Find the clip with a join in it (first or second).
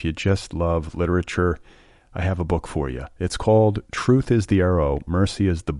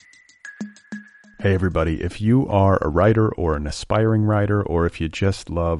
second